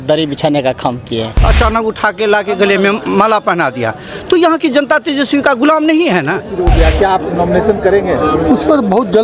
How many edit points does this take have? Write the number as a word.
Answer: two